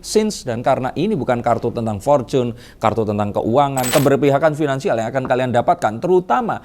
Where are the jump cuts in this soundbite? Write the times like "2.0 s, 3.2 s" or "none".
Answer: 3.9 s